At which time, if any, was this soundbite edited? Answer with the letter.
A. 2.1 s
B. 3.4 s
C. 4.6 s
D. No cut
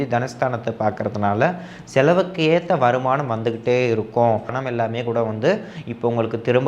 C